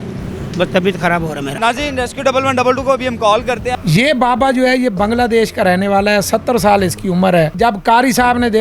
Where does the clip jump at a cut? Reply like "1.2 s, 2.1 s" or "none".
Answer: 1.5 s, 3.7 s, 7.5 s

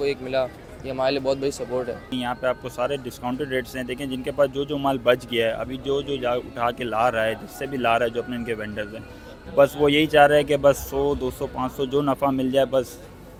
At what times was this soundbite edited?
none

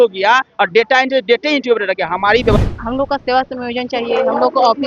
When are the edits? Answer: 2.6 s

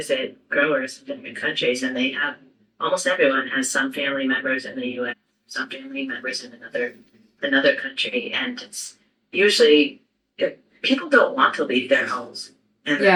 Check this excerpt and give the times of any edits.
none

